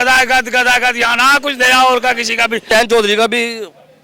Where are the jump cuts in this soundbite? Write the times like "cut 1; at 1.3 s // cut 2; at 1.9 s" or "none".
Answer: cut 1; at 2.6 s